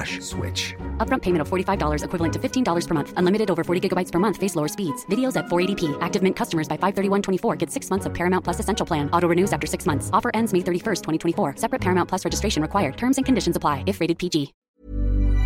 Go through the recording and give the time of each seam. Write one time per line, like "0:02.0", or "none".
0:14.6